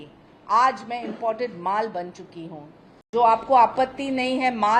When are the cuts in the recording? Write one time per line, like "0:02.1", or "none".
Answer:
0:03.0